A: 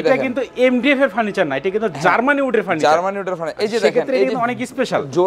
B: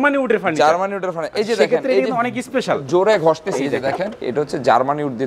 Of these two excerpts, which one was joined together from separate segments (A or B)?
B